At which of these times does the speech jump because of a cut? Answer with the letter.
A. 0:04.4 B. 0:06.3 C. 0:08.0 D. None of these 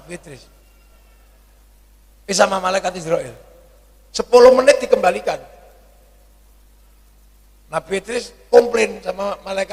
D